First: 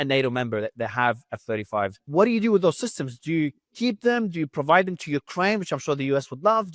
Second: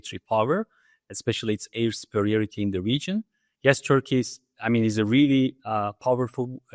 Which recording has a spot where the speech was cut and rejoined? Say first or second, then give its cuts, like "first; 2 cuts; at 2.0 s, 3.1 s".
first; 1 cut; at 2.0 s